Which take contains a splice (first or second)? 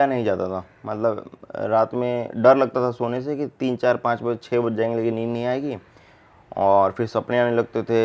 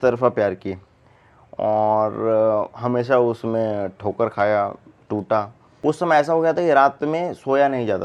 second